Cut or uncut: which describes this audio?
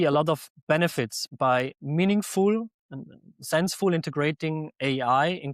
cut